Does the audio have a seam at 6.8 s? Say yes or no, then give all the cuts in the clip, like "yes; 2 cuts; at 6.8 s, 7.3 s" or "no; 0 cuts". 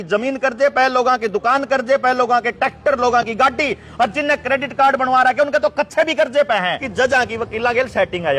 yes; 1 cut; at 6.8 s